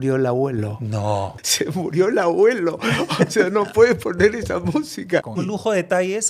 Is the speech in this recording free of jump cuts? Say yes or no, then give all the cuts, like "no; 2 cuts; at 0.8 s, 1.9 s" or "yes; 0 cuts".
no; 2 cuts; at 1.3 s, 5.4 s